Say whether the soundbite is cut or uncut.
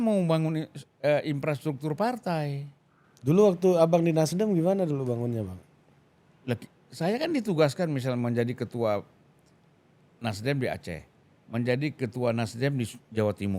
uncut